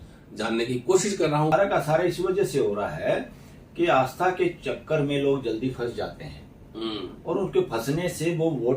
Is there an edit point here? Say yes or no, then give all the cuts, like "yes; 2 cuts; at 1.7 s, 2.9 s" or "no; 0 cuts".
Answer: yes; 1 cut; at 1.5 s